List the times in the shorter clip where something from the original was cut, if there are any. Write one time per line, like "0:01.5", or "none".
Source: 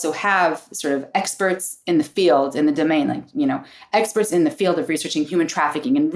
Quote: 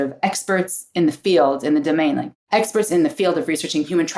0:02.3